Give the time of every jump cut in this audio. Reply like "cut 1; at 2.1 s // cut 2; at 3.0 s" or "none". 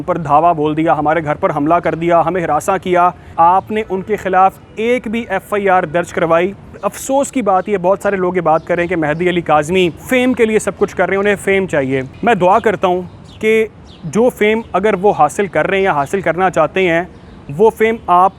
cut 1; at 3.3 s // cut 2; at 6.8 s // cut 3; at 10.0 s // cut 4; at 12.1 s